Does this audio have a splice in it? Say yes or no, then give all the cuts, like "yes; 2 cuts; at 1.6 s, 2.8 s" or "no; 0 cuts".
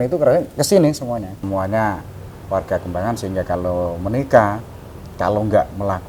yes; 1 cut; at 1.4 s